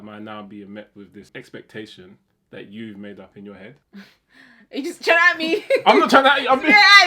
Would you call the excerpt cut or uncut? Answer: cut